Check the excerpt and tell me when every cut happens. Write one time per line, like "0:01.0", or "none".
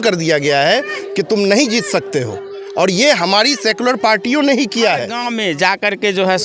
0:05.2